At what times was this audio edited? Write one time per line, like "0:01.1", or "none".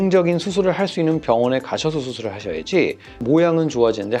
0:03.2

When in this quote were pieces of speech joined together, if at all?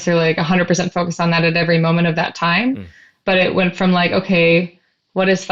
none

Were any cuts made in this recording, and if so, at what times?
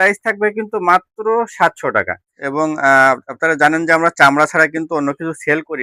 0:02.4

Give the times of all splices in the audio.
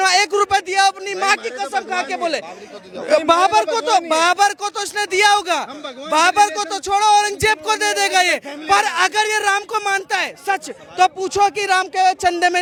none

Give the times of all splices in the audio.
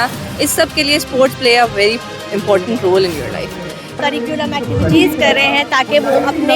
0:04.0

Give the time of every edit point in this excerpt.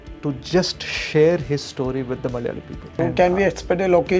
0:02.8

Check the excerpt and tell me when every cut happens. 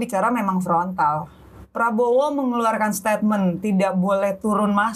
none

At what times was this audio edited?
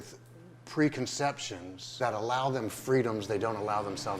0:01.9

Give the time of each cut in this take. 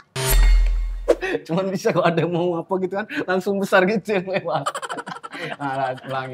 none

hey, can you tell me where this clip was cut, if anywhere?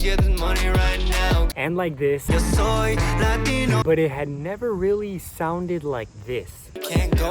0:01.5
0:03.8

